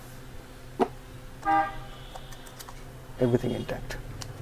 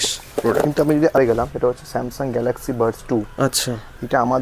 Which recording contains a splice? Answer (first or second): second